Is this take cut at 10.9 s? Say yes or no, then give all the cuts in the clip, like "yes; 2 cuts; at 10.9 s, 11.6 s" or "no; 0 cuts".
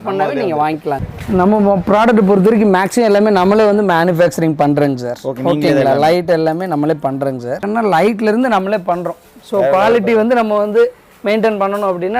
no; 2 cuts; at 1.0 s, 7.6 s